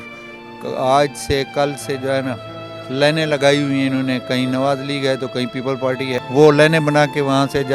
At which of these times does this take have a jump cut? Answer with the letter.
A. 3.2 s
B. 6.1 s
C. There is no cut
B